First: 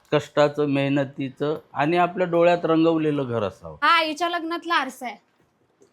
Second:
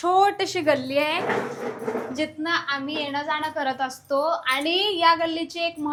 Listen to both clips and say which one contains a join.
first; 1 cut; at 3.7 s

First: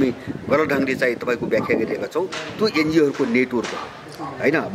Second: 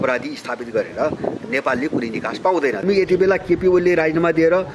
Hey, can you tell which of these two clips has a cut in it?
second; 1 cut; at 2.8 s

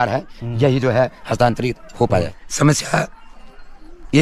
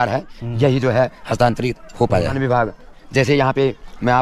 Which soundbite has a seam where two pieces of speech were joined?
first; 1 cut; at 2.3 s

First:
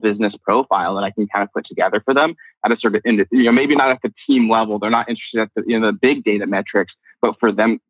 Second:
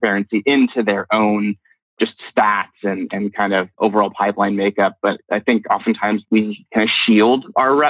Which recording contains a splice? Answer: second; 4 cuts; at 1.7 s, 3.7 s, 5.2 s, 6.2 s

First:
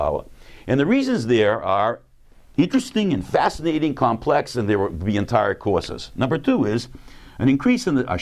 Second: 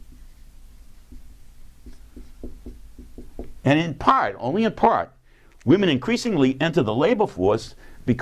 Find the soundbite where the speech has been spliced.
second; 1 cut; at 2.9 s

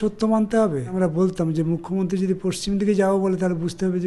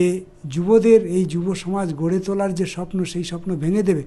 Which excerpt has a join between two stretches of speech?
first; 1 cut; at 0.9 s

